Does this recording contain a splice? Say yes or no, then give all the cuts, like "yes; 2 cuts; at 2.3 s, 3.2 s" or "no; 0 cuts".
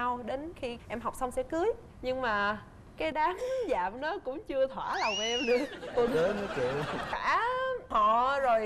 yes; 1 cut; at 7.2 s